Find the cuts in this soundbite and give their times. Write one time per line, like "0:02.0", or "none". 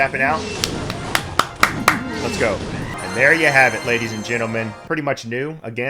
0:04.8